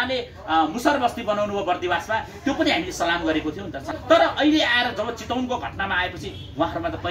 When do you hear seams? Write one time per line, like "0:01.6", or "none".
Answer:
0:03.9